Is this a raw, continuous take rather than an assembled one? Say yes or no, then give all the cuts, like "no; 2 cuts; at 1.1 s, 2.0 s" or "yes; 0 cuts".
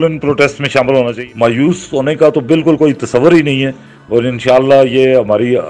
no; 1 cut; at 1.2 s